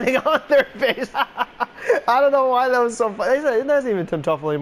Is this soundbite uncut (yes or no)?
yes